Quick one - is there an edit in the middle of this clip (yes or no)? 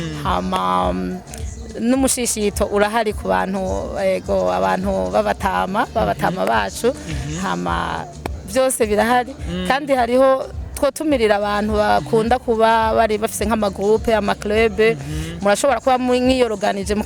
no